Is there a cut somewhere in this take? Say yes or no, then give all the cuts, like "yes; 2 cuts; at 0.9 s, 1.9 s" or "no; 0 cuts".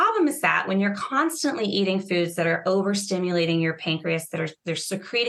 no; 0 cuts